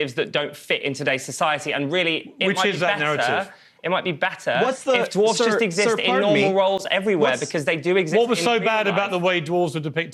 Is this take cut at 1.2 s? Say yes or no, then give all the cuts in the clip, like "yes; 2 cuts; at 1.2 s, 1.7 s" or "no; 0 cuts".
no; 1 cut; at 8.0 s